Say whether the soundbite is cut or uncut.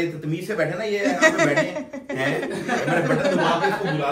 uncut